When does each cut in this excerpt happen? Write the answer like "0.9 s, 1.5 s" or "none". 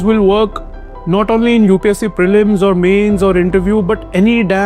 none